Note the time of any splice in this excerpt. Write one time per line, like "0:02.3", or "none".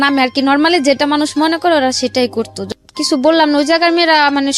0:02.6